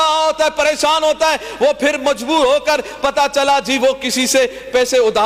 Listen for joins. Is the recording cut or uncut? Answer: uncut